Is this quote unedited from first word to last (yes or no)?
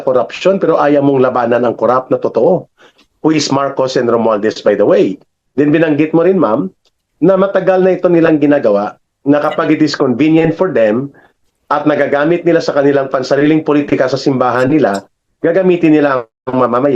yes